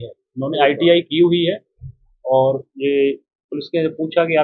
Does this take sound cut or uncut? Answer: uncut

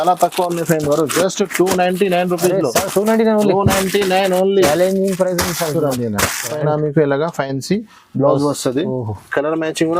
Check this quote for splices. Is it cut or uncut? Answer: cut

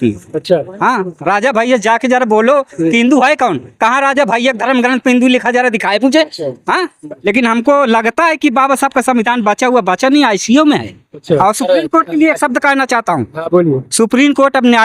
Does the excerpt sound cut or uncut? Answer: cut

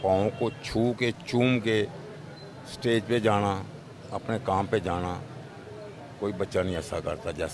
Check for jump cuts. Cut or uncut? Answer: uncut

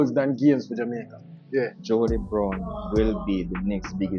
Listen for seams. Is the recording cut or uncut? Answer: cut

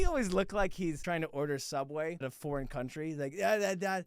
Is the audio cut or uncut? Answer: cut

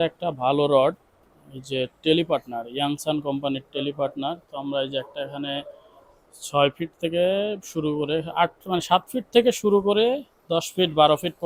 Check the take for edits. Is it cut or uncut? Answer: uncut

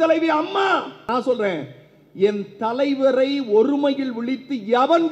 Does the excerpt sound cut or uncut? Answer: cut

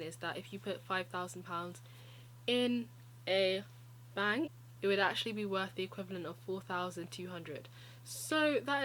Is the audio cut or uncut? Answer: cut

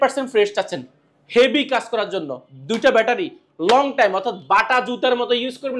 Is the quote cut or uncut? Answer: uncut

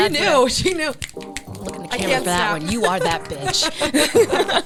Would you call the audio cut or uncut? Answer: uncut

